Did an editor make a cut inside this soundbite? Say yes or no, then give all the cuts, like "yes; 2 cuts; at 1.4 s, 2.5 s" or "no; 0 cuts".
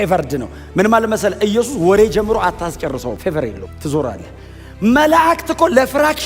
yes; 1 cut; at 3.3 s